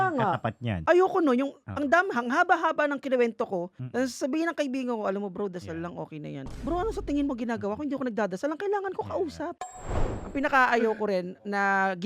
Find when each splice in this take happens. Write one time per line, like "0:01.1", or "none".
0:09.8